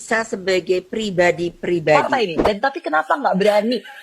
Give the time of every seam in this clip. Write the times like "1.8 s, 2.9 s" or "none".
2.0 s